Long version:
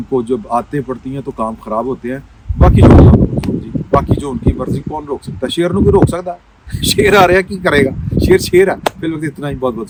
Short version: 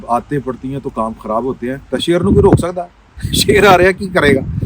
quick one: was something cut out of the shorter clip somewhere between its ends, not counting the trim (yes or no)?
yes